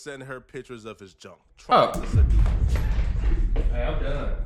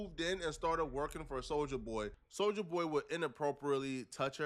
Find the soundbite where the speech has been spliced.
second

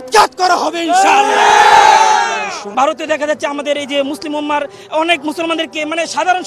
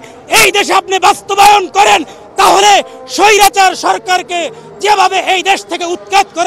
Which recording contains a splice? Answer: first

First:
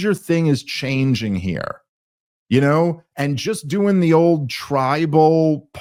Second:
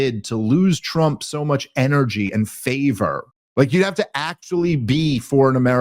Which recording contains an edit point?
second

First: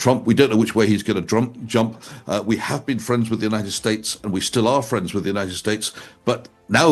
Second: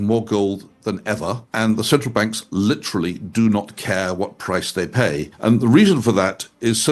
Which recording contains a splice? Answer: second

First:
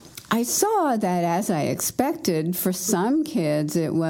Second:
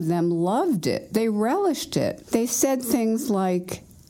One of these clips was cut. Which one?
second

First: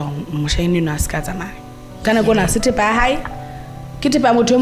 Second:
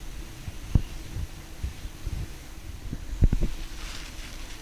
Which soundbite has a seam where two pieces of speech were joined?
second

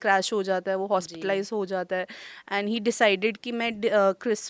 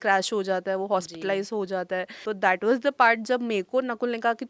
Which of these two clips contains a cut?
second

